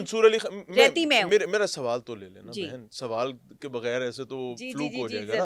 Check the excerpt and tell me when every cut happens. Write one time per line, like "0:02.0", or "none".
none